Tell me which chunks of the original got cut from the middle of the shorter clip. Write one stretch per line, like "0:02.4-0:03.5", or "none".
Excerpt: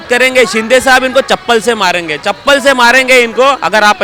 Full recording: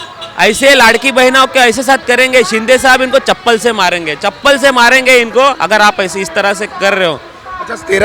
none